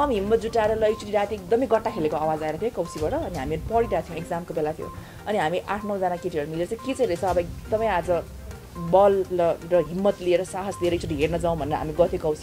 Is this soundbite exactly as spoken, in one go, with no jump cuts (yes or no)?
yes